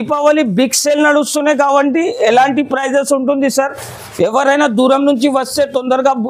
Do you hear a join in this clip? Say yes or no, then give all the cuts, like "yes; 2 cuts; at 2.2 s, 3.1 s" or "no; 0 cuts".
no; 0 cuts